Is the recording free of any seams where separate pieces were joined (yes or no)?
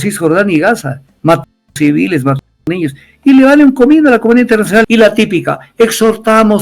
no